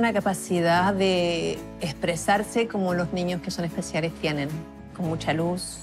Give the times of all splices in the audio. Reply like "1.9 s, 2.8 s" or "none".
none